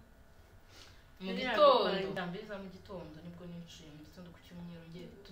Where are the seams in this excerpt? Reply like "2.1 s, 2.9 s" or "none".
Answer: 2.2 s